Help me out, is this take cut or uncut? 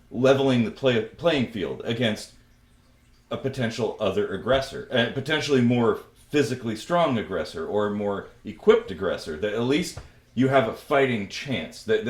uncut